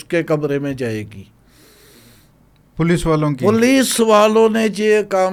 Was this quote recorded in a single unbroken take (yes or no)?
yes